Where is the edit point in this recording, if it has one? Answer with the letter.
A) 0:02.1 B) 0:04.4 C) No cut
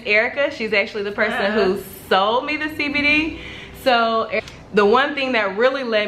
B